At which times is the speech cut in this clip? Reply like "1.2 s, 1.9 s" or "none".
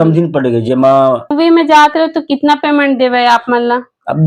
1.3 s

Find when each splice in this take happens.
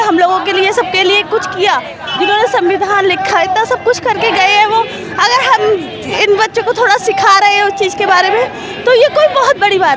none

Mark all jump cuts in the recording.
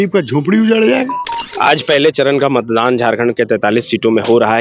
1.4 s

